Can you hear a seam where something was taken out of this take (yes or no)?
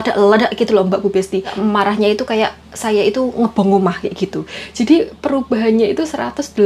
yes